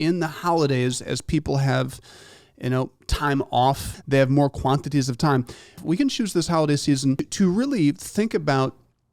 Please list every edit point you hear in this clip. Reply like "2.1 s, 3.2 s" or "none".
3.9 s, 5.8 s, 7.3 s